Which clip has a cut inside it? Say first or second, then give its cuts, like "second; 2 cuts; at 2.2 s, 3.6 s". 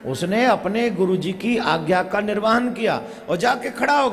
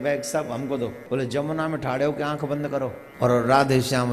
second; 2 cuts; at 1.0 s, 3.0 s